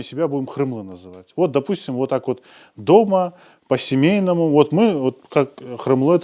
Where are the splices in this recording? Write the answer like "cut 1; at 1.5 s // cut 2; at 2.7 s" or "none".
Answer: none